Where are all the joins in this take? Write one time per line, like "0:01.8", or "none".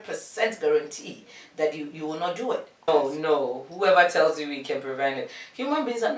0:02.9